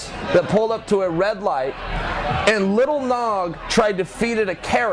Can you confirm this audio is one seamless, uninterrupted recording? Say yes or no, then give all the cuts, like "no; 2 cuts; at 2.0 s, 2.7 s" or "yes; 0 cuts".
yes; 0 cuts